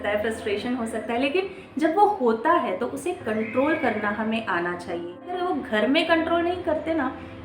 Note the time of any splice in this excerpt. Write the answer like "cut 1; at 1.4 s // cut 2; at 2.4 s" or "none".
cut 1; at 5.1 s